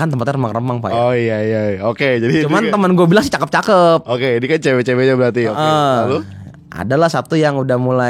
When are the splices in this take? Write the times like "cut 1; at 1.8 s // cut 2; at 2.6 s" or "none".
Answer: none